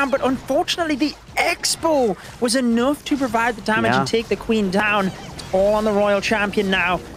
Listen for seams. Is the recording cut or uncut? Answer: uncut